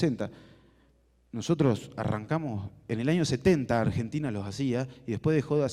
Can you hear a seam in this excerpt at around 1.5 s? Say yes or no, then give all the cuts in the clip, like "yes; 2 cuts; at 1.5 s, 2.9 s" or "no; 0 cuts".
yes; 1 cut; at 1.5 s